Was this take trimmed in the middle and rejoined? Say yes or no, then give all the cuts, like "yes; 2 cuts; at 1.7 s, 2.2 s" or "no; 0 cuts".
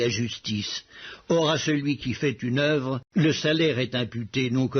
yes; 1 cut; at 1.0 s